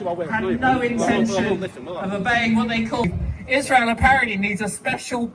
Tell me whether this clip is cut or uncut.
cut